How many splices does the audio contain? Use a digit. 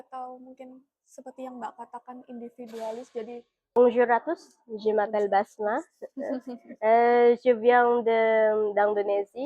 1